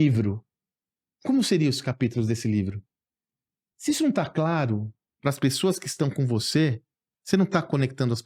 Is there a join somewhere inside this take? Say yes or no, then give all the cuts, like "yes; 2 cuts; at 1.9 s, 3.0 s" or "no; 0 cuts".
no; 0 cuts